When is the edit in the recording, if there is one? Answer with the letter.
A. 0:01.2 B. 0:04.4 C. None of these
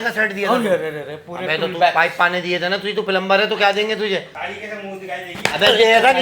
B